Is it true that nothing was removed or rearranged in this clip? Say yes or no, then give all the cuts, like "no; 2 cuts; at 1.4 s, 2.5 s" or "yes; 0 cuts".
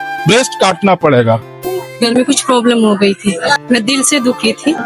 no; 2 cuts; at 1.5 s, 3.6 s